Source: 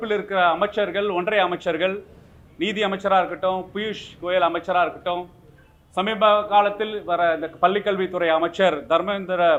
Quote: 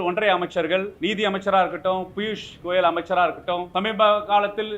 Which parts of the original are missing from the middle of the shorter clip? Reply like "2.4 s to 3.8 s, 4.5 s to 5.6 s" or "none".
2.0 s to 2.5 s, 5.2 s to 5.9 s